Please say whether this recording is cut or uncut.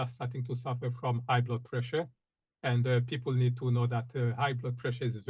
uncut